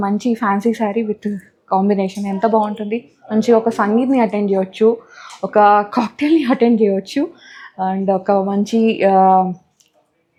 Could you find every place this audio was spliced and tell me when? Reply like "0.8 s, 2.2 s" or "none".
none